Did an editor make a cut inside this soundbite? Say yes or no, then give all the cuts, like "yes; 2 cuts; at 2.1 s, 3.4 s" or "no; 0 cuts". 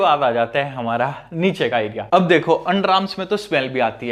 no; 0 cuts